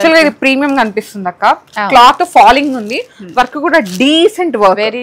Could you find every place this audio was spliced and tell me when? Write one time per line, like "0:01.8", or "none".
none